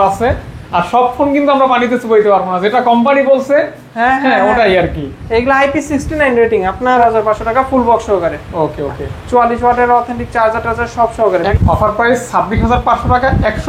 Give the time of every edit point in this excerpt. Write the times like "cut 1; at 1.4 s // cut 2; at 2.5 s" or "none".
cut 1; at 7.0 s // cut 2; at 11.5 s